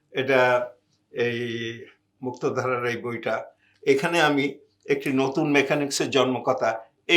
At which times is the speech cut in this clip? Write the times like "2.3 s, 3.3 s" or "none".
none

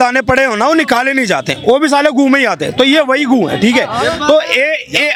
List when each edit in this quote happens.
none

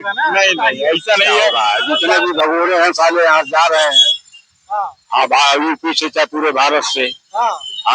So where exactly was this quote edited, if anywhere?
1.6 s

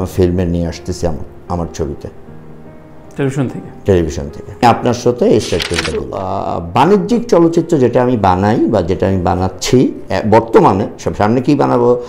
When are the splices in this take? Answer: 4.6 s, 6.1 s

